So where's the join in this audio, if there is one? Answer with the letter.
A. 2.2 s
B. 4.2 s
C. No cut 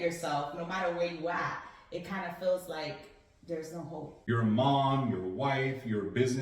B